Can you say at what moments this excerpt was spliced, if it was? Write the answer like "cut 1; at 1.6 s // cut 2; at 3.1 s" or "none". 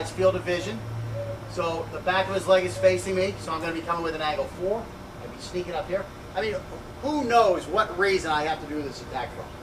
none